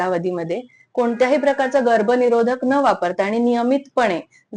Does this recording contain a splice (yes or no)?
no